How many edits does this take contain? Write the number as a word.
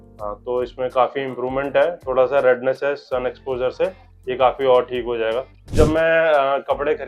one